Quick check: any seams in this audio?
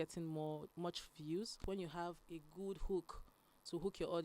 yes; 1 cut; at 1.6 s

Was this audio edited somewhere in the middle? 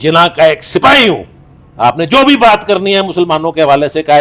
no; 0 cuts

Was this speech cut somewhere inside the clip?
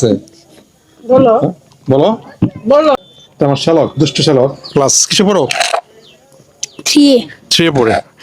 yes; 1 cut; at 3.0 s

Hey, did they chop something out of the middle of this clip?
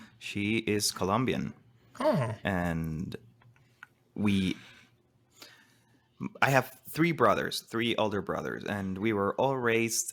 no; 0 cuts

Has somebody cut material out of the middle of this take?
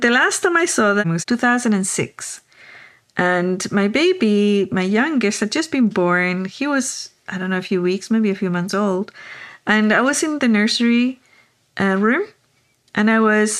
yes; 1 cut; at 1.0 s

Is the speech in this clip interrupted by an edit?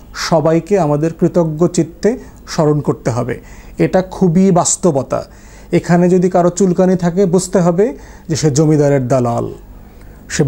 no; 0 cuts

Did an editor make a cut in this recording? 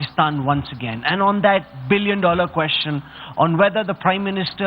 no; 0 cuts

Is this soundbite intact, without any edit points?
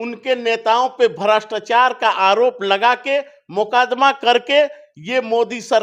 yes; 0 cuts

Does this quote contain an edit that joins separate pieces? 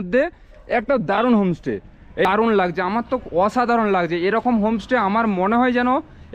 yes; 1 cut; at 2.2 s

